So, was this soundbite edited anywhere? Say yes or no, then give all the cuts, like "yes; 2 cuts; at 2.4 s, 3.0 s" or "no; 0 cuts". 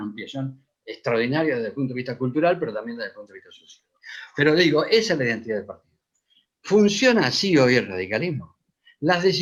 no; 0 cuts